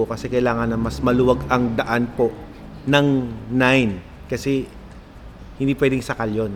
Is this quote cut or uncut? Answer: uncut